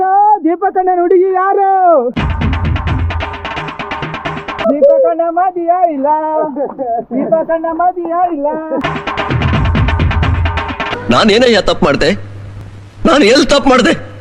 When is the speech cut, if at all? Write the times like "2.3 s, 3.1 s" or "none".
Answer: none